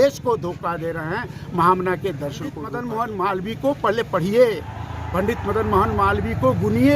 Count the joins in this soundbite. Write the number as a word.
one